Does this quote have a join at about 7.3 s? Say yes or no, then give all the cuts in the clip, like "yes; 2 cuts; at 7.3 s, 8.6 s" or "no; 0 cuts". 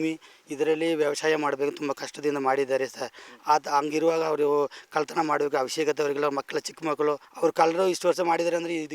yes; 1 cut; at 7.3 s